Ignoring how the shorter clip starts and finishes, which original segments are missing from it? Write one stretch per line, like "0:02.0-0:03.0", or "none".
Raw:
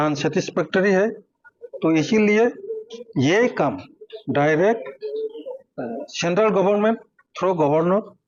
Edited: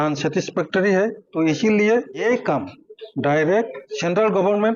0:01.2-0:01.7
0:02.7-0:03.3
0:05.0-0:06.1